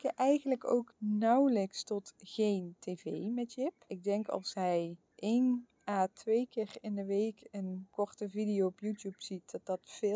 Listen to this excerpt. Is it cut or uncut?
cut